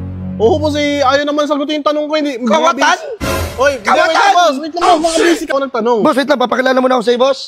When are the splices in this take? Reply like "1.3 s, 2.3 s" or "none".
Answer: 5.5 s